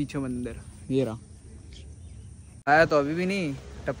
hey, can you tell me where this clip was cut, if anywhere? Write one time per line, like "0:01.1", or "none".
0:02.6